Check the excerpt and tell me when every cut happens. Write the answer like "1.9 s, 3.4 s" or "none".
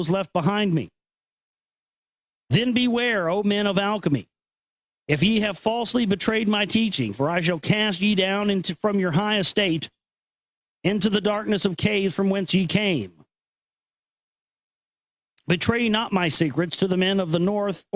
none